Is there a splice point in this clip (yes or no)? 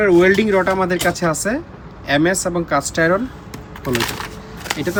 no